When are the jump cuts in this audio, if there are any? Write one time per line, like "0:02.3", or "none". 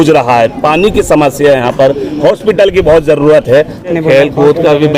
0:03.8